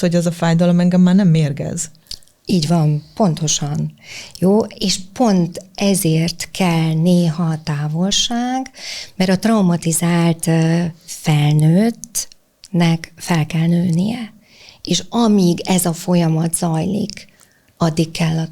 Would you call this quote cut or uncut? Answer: uncut